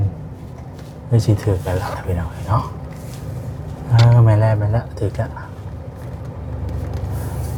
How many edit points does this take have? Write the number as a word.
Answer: zero